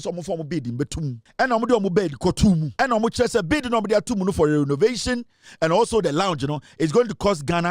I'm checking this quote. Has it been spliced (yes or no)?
yes